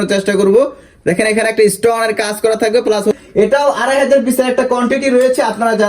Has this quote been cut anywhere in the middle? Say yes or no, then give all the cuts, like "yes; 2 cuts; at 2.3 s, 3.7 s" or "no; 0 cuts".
yes; 1 cut; at 3.2 s